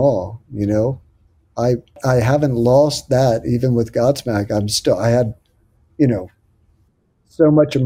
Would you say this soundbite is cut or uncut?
cut